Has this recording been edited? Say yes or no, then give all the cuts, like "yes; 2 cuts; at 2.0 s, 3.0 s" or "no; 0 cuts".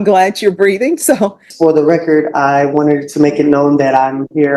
yes; 1 cut; at 1.5 s